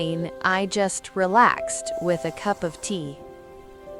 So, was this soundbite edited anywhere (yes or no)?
no